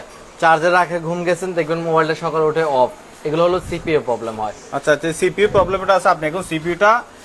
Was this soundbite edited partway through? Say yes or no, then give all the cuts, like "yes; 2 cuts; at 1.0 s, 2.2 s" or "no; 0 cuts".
no; 0 cuts